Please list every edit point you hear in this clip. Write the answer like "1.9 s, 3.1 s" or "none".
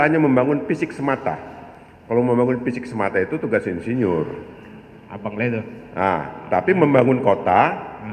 none